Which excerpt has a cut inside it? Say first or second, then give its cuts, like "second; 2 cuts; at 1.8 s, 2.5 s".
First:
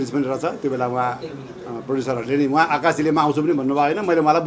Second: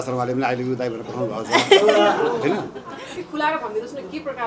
second; 1 cut; at 3.2 s